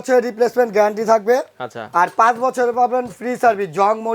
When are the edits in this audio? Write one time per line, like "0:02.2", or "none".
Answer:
none